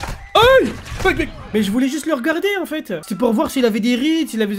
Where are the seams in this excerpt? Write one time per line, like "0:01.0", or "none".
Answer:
0:01.4